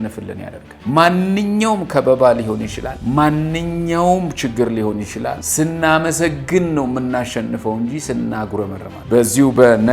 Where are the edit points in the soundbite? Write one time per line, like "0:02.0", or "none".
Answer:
none